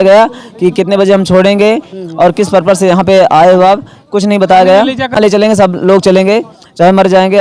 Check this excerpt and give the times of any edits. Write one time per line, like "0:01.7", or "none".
0:05.2